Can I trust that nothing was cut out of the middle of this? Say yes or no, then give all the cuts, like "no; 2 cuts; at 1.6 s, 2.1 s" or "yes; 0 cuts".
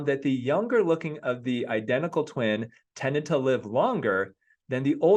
yes; 0 cuts